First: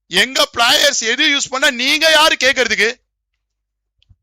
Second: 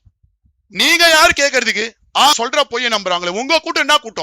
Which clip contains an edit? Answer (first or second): second